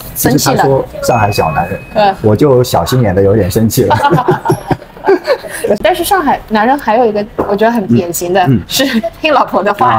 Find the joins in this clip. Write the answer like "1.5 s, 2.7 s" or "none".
5.8 s